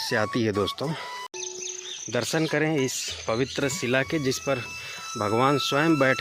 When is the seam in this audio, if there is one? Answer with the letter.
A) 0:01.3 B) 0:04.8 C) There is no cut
A